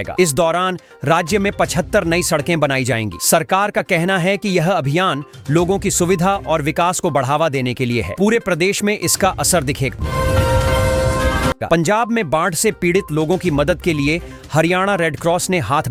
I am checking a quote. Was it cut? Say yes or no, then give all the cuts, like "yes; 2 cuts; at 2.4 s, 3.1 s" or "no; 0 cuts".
no; 0 cuts